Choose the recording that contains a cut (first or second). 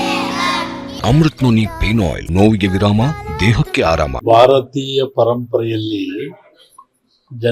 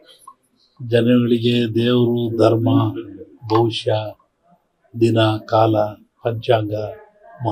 first